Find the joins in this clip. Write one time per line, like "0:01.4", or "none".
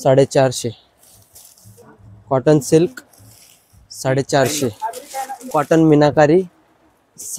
0:01.8
0:05.4

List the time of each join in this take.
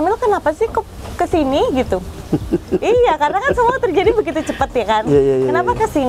none

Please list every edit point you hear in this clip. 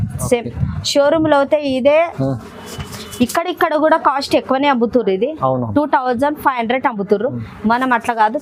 none

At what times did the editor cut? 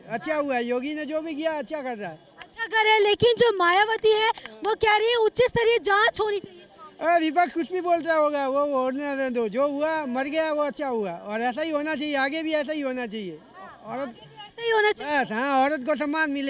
none

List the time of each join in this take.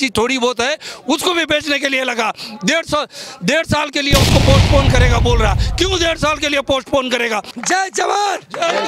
0:07.5

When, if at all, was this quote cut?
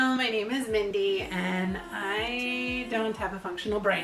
none

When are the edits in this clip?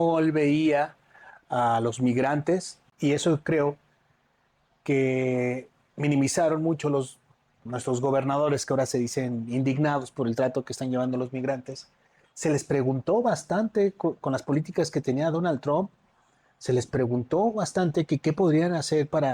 0:02.8

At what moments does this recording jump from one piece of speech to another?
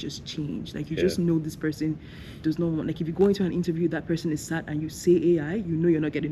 none

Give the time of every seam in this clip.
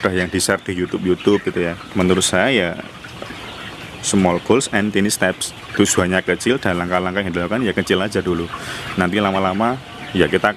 0:01.8

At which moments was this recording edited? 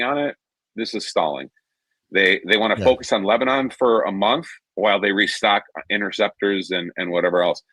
none

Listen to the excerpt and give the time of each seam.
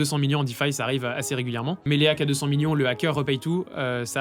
0:01.8

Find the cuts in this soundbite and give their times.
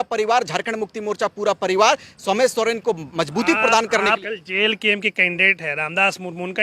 0:04.2

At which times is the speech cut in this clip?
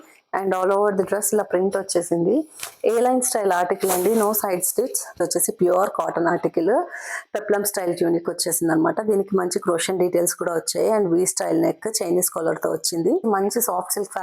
0:05.2
0:13.2

